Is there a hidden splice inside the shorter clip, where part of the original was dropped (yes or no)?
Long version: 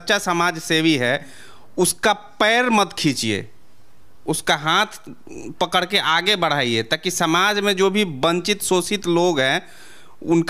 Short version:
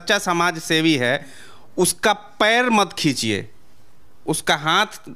no